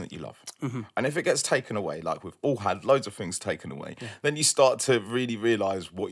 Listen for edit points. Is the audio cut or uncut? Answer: uncut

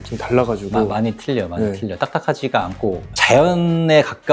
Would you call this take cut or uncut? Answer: cut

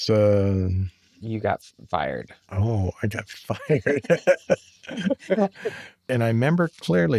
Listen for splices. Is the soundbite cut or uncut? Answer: cut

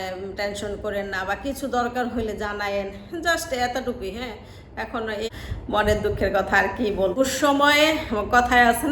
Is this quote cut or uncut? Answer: cut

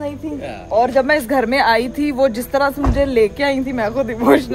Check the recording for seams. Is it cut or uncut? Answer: uncut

